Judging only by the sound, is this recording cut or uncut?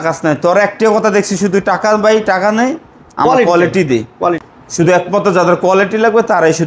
cut